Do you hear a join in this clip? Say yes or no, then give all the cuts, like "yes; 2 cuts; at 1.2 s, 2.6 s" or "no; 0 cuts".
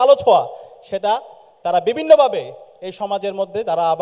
no; 0 cuts